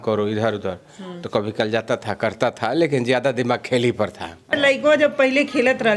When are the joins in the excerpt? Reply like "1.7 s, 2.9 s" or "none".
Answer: 4.5 s

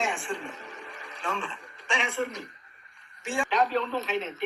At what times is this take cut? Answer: 3.4 s

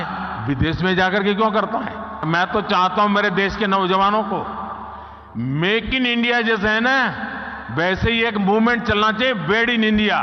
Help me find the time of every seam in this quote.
2.2 s

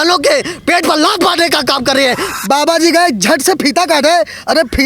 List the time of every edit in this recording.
2.3 s

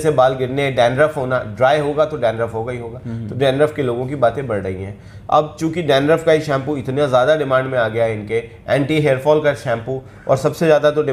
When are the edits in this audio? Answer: none

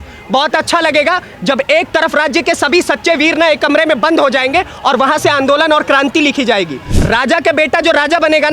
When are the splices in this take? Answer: 6.9 s

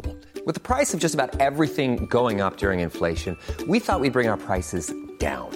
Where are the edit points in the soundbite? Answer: none

